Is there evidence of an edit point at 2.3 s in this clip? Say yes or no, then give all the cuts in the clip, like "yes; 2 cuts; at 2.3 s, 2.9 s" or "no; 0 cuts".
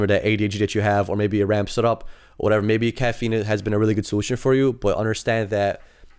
no; 0 cuts